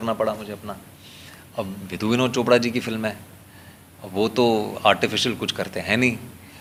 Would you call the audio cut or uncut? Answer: uncut